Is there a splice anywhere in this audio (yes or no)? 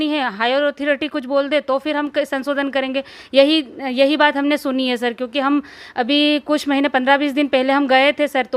no